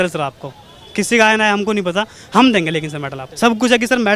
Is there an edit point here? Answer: yes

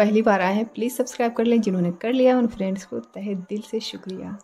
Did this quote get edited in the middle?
no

